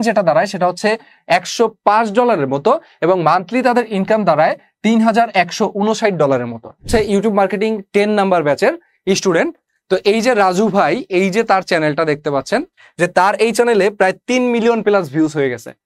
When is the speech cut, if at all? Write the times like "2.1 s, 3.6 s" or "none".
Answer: 6.9 s, 12.8 s